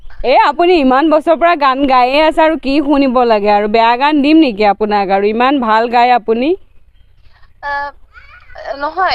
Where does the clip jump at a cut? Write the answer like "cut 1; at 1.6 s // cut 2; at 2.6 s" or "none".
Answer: none

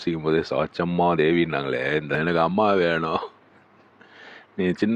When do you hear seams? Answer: cut 1; at 2.1 s

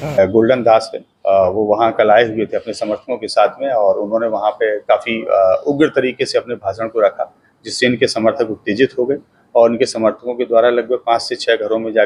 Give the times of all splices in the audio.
none

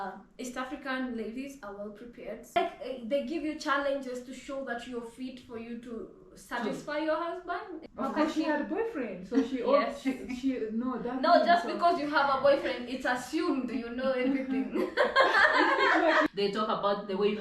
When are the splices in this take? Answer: cut 1; at 2.4 s // cut 2; at 7.8 s // cut 3; at 16.3 s

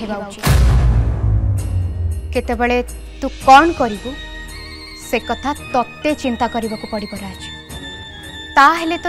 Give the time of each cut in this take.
cut 1; at 2.1 s

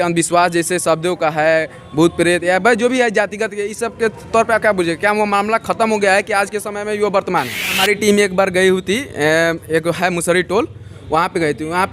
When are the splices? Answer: cut 1; at 7.6 s

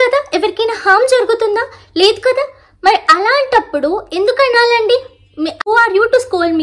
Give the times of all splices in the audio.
cut 1; at 5.7 s

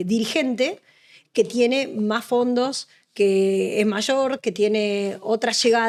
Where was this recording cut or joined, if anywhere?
none

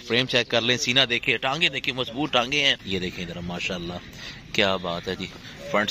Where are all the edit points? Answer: cut 1; at 2.8 s

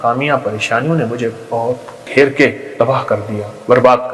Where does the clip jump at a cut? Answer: cut 1; at 3.2 s

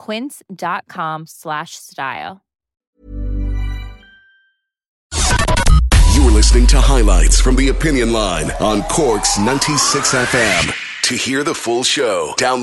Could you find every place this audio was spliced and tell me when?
cut 1; at 5.0 s

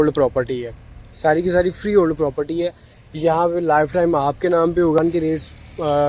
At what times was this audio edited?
cut 1; at 5.0 s

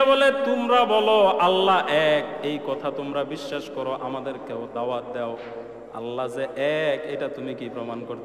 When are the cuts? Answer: none

